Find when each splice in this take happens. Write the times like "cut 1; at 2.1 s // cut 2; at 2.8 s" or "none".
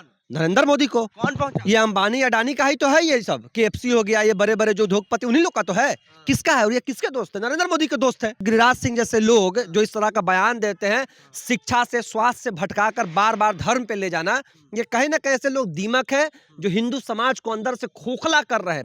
cut 1; at 8.4 s

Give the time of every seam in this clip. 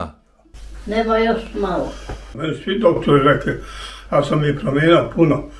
cut 1; at 2.3 s

